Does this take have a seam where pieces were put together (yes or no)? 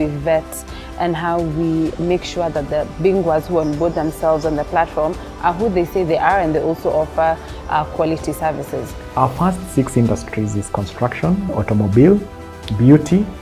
no